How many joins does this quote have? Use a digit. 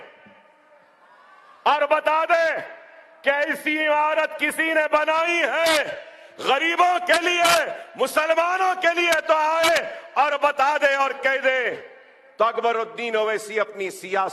0